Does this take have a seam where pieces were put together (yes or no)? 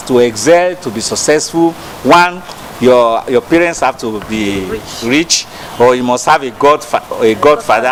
no